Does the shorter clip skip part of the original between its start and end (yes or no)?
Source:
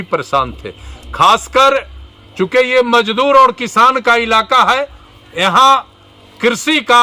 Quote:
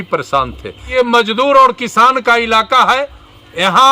yes